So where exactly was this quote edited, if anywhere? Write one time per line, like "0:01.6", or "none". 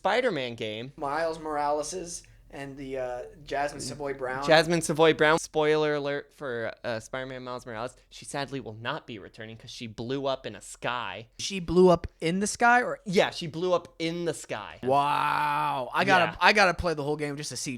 0:01.0
0:05.4
0:11.3
0:14.8

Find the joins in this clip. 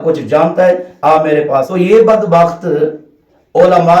0:01.7

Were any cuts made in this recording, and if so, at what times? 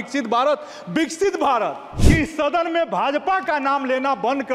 0:01.9

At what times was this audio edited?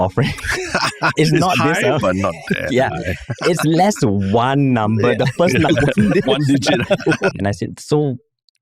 0:07.4

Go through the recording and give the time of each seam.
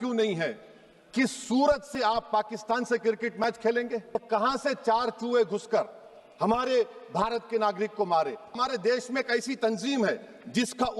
0:04.2
0:08.6

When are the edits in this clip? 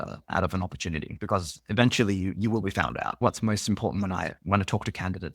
0:03.2
0:04.4

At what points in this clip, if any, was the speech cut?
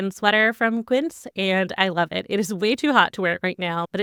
none

